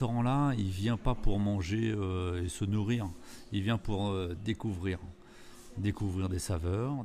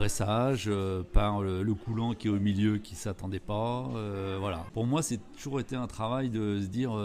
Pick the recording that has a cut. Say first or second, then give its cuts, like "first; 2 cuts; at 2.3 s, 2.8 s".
second; 1 cut; at 4.6 s